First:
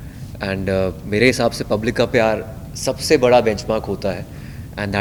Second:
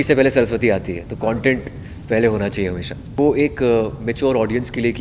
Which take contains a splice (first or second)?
second